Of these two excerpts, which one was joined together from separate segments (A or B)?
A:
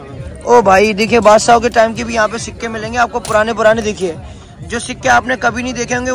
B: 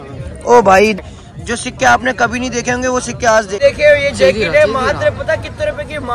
B